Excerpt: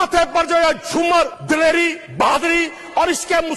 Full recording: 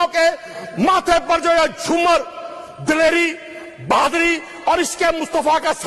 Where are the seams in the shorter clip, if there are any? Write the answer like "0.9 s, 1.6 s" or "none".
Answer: 1.4 s, 2.0 s